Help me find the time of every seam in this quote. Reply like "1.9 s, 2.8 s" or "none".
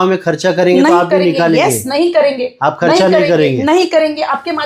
none

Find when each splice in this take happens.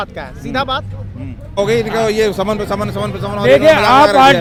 none

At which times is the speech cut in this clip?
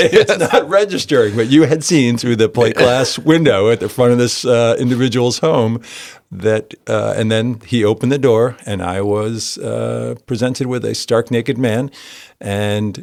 none

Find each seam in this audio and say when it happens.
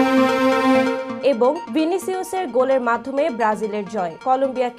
1.1 s

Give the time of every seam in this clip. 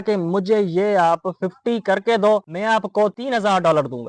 none

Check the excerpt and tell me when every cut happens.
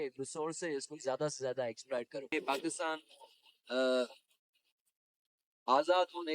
2.3 s

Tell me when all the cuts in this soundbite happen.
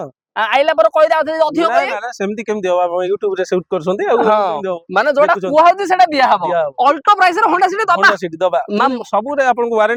none

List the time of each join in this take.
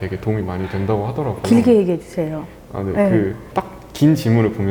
none

